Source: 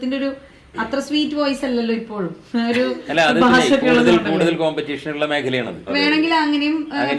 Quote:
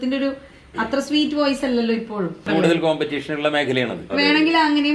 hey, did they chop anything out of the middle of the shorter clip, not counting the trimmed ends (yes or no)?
yes